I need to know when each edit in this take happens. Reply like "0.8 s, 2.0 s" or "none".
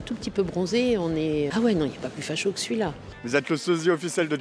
3.2 s